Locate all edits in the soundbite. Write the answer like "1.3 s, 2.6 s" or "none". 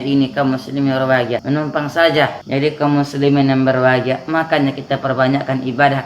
1.4 s, 2.4 s